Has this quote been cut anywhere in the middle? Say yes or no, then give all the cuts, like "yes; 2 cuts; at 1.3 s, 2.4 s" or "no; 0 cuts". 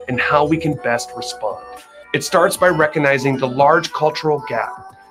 no; 0 cuts